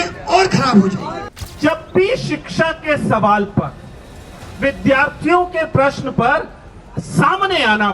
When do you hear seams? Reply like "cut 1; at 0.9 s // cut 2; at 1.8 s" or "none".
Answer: cut 1; at 1.6 s